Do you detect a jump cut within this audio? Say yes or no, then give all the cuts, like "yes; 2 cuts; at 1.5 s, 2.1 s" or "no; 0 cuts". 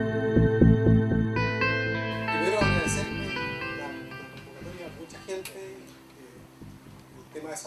no; 0 cuts